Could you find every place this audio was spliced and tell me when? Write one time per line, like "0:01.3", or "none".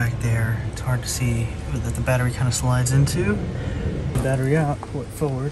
0:04.2